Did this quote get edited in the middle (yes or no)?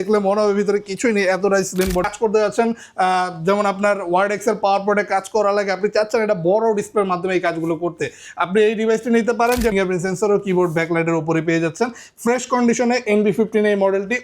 yes